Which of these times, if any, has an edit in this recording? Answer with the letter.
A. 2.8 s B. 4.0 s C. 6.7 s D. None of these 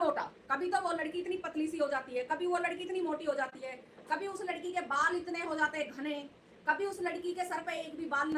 D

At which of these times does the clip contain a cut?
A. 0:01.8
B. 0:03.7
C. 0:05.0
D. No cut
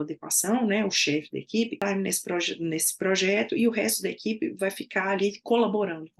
A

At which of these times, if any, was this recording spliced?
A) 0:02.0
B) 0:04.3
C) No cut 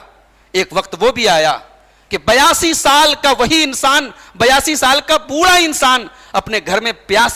C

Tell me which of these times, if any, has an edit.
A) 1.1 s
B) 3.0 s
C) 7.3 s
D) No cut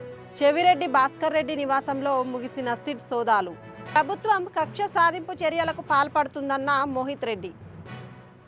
D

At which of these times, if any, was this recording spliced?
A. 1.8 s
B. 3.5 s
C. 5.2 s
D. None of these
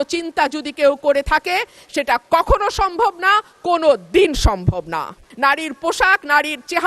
C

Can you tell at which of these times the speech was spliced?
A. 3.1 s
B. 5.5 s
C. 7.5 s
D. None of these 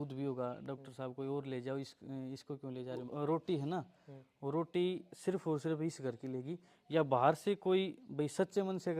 A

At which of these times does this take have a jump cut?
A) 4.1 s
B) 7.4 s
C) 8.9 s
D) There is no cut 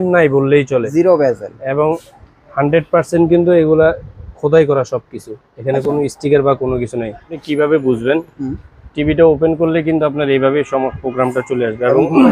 B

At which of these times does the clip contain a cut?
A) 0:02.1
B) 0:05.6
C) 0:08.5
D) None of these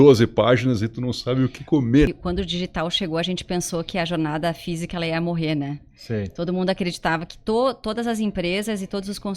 A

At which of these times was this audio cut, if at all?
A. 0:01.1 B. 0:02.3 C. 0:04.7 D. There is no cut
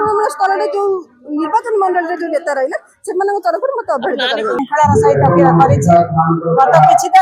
C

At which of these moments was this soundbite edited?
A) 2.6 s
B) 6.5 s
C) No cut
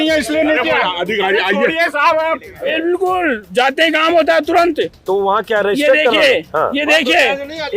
A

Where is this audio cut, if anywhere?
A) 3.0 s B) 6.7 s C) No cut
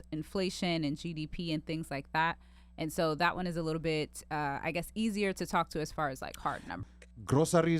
B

